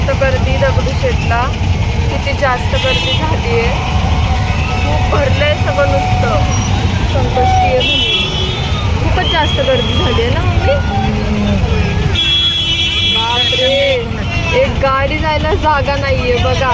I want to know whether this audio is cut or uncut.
uncut